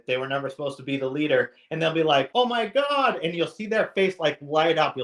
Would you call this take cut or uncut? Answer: cut